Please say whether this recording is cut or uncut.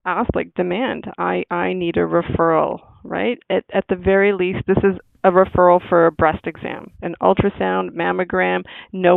uncut